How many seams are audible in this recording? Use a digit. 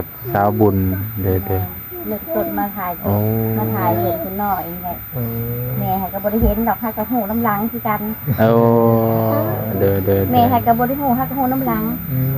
0